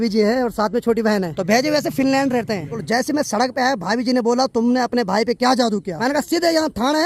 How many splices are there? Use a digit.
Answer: 3